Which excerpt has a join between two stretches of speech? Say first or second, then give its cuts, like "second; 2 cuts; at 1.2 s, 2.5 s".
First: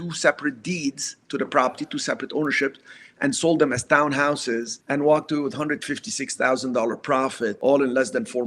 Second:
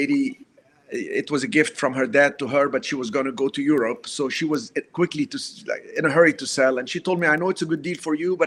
first; 2 cuts; at 4.7 s, 7.6 s